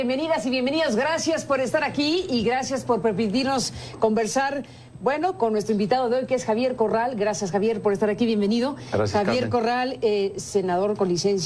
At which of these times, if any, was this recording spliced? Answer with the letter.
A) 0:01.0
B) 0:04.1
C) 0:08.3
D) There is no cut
C